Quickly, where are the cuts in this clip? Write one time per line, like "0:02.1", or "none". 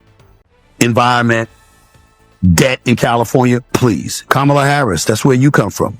0:04.2